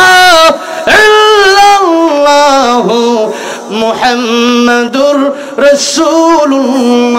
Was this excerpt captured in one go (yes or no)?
yes